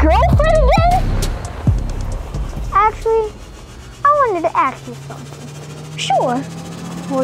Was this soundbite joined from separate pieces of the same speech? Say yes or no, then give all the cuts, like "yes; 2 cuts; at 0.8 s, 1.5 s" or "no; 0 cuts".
yes; 1 cut; at 2.7 s